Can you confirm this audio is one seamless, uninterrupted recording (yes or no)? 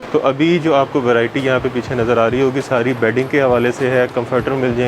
yes